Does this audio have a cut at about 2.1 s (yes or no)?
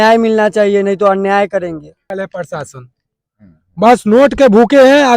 yes